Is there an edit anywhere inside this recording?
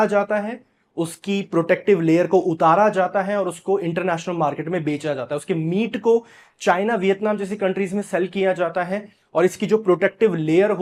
no; 0 cuts

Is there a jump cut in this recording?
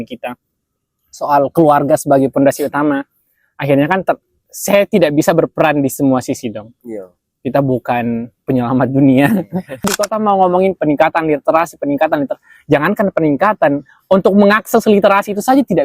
yes; 1 cut; at 9.8 s

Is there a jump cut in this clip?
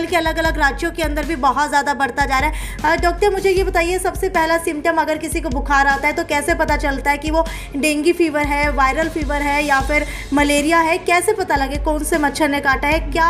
no; 0 cuts

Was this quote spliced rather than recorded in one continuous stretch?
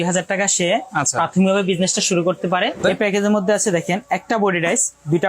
yes; 1 cut; at 2.8 s

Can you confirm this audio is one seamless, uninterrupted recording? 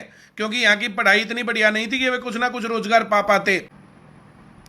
no; 1 cut; at 3.8 s

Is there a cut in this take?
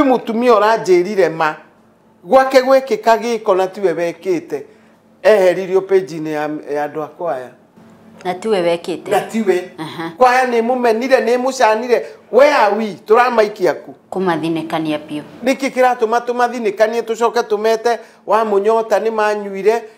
no; 0 cuts

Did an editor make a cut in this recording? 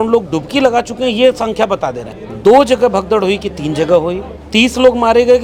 no; 0 cuts

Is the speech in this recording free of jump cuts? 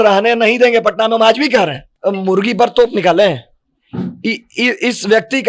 no; 1 cut; at 1.9 s

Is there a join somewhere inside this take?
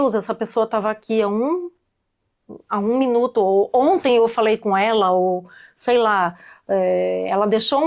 no; 0 cuts

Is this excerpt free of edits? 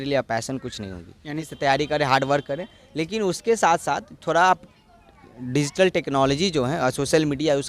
no; 1 cut; at 1.4 s

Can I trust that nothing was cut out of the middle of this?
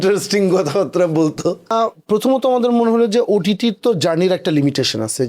no; 1 cut; at 1.6 s

